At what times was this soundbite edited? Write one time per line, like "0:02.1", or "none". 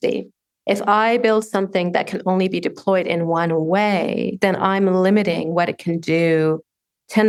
none